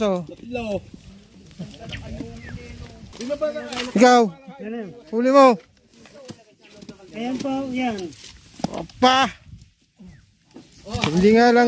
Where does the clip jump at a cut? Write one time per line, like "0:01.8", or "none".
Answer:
none